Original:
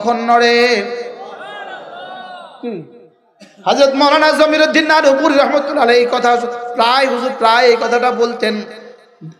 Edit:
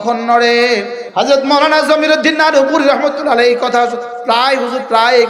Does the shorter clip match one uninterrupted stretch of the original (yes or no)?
no